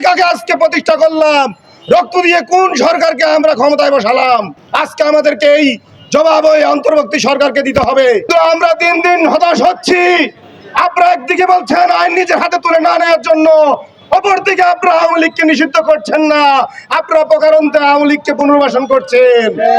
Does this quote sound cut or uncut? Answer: cut